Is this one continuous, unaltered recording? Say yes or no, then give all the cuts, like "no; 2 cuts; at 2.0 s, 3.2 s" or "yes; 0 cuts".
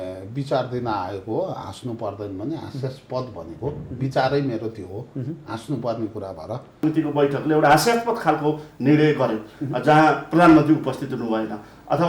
no; 1 cut; at 6.8 s